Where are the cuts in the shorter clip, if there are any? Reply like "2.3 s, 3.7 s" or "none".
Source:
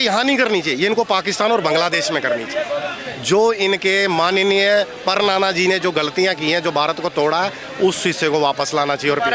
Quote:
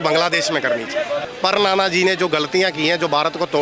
1.3 s